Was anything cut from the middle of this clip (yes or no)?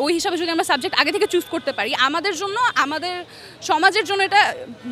no